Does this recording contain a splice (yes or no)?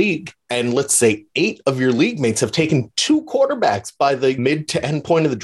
yes